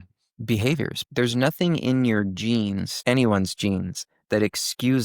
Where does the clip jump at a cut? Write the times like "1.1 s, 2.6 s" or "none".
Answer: 1.0 s